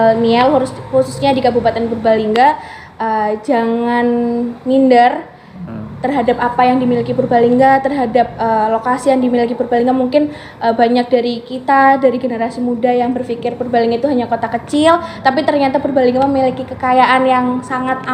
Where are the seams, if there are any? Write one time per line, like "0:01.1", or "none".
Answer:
none